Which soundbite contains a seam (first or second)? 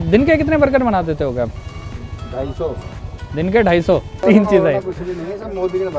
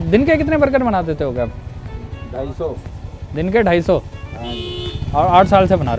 first